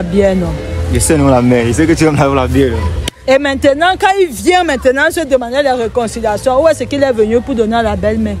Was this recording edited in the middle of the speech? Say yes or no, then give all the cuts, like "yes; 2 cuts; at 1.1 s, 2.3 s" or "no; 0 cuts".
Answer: no; 0 cuts